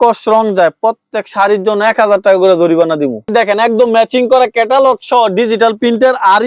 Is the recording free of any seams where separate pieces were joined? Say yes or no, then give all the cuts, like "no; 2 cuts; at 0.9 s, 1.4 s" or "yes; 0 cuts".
no; 1 cut; at 3.2 s